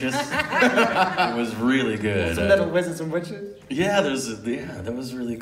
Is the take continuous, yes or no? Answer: yes